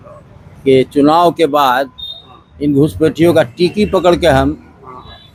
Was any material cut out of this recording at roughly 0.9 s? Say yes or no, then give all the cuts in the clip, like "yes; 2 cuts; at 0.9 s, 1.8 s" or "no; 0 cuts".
no; 0 cuts